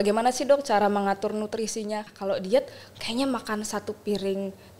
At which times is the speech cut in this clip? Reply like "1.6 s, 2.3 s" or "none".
2.0 s